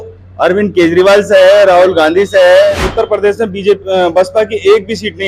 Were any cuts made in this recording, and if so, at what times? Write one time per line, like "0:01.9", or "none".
0:02.8